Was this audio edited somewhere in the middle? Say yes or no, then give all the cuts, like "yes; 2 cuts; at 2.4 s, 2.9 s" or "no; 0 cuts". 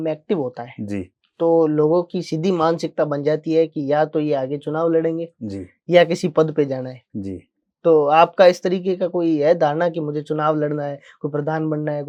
no; 0 cuts